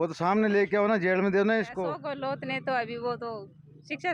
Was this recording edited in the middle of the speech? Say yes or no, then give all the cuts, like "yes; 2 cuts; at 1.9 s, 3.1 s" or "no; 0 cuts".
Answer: yes; 1 cut; at 2.0 s